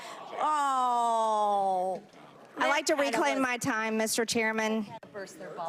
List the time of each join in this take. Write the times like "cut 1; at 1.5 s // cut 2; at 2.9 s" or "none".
none